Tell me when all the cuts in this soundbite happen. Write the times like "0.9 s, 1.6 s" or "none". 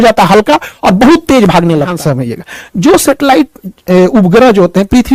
2.0 s